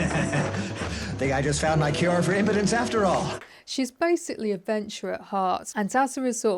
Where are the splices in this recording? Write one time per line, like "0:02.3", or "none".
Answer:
0:03.4
0:05.7